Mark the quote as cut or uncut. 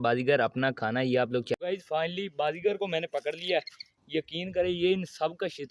cut